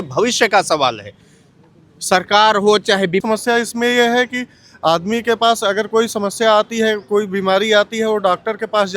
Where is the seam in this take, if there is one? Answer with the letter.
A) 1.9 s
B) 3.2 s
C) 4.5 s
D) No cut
B